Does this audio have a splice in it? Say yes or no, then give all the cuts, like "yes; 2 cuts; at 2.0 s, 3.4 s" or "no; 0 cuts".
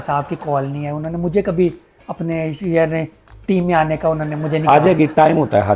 no; 0 cuts